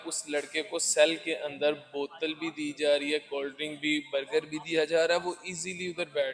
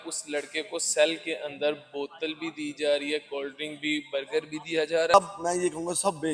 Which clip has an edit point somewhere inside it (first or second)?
second